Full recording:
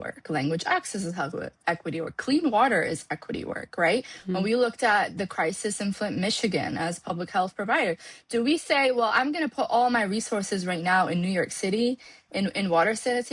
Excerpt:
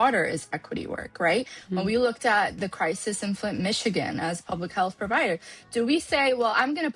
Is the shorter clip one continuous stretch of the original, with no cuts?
yes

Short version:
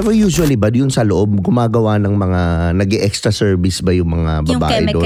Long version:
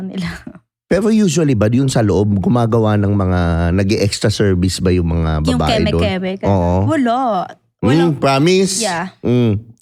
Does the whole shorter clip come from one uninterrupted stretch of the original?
yes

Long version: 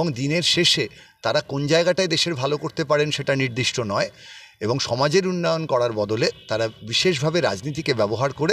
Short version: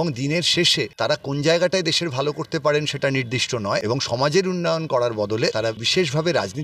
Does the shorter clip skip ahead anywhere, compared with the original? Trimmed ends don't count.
yes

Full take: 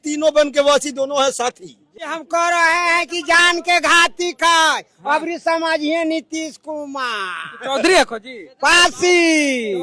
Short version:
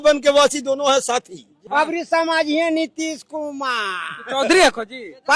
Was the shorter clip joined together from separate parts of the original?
yes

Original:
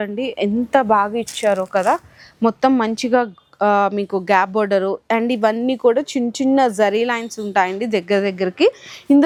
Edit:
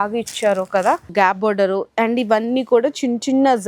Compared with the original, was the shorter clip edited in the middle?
yes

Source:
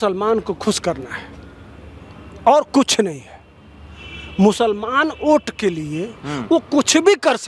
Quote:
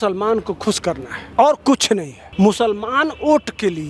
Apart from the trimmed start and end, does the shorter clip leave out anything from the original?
yes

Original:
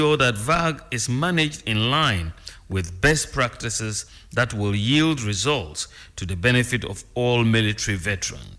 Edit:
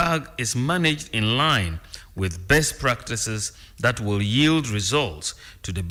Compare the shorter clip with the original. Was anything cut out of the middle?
no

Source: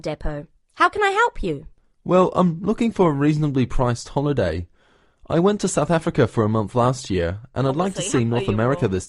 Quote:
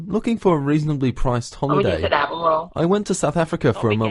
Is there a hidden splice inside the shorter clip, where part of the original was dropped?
no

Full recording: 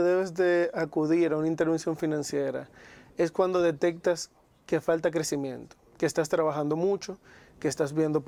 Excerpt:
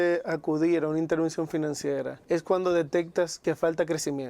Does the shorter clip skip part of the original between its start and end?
yes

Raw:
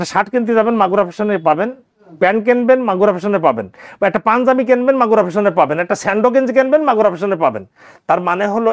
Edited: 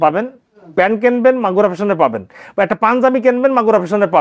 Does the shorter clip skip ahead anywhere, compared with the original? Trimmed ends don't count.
no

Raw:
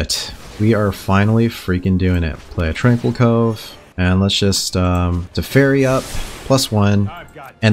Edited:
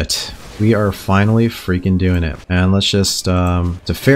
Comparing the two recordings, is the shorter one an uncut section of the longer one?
no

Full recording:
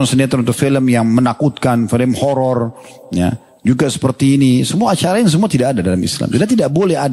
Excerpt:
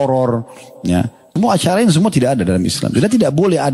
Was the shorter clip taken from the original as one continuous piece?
no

